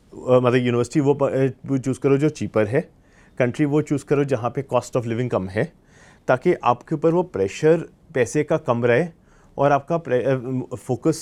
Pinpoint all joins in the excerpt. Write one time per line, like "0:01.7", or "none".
none